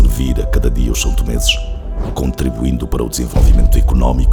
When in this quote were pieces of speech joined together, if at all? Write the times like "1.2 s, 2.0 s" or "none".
none